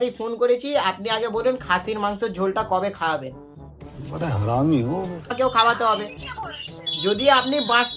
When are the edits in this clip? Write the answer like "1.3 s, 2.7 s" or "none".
5.3 s